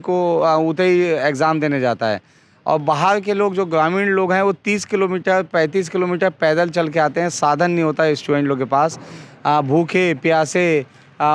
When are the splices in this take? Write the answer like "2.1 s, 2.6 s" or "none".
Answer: none

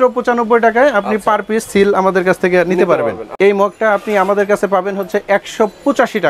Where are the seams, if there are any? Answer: 3.2 s

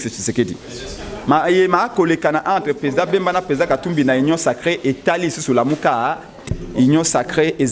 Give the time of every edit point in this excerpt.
6.4 s

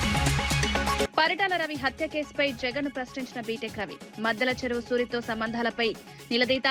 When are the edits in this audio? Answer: 1.0 s

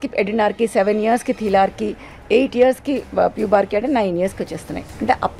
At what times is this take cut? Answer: none

